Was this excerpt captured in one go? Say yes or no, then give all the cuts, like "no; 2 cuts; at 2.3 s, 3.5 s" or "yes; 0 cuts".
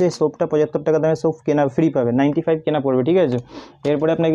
yes; 0 cuts